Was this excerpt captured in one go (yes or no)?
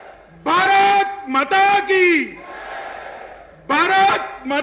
yes